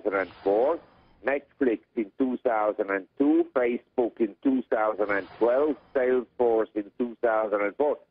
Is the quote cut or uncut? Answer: cut